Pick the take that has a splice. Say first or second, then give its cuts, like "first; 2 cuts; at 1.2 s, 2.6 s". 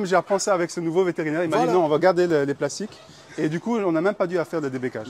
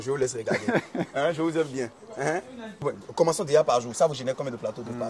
second; 1 cut; at 2.8 s